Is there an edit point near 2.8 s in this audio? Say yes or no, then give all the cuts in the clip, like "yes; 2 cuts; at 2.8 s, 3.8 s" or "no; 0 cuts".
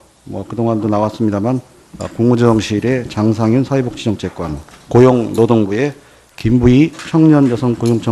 yes; 1 cut; at 2.8 s